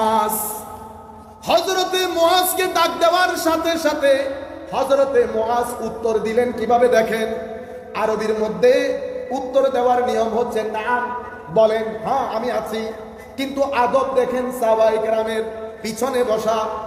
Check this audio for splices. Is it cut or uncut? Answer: uncut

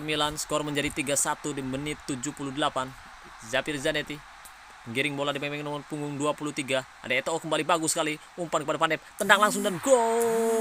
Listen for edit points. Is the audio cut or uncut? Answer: uncut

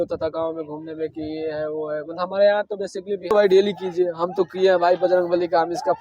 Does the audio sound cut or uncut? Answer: cut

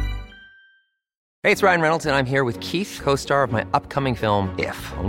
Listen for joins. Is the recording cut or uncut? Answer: cut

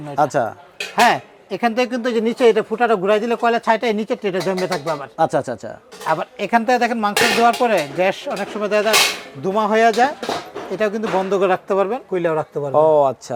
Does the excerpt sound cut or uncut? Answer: uncut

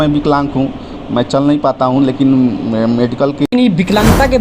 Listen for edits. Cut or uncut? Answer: cut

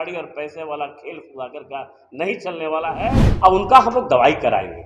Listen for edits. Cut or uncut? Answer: cut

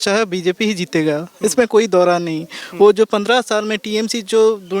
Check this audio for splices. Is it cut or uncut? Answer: uncut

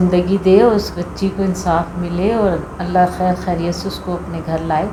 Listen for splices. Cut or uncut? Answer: uncut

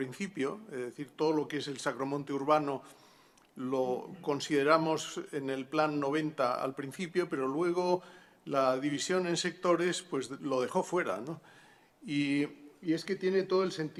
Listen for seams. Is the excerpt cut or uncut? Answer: uncut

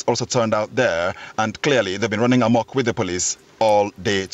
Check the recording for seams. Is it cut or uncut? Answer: uncut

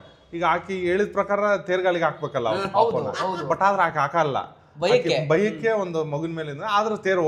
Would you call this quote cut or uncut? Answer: uncut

